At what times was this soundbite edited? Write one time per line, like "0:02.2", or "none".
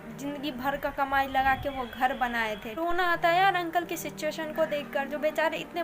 0:02.7